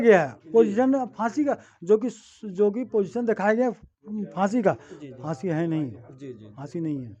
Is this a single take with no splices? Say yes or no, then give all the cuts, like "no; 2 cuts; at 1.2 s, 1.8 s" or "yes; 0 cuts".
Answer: yes; 0 cuts